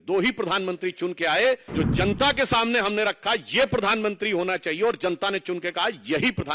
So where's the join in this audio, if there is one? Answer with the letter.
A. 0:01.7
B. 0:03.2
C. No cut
A